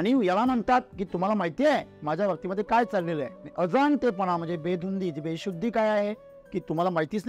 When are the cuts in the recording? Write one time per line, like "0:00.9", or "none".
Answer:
0:03.4